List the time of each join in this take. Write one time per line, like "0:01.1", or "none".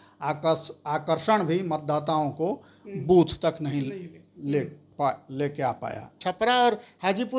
0:06.2